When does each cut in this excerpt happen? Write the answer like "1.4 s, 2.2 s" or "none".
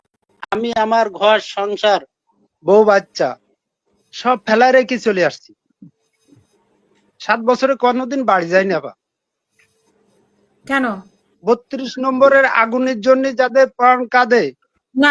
none